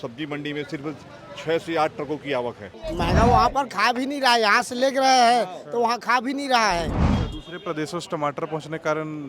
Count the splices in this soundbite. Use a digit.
2